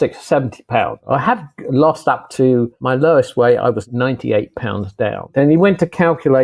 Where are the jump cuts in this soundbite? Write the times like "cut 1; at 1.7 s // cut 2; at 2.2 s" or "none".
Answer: cut 1; at 1.0 s // cut 2; at 2.8 s // cut 3; at 3.8 s // cut 4; at 5.3 s